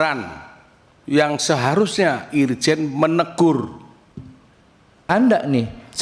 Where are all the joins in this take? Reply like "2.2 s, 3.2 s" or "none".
5.0 s